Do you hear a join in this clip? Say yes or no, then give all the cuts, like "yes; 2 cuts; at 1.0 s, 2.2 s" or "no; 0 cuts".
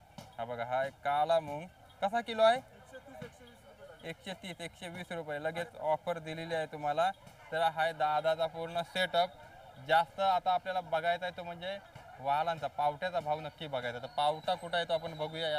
no; 0 cuts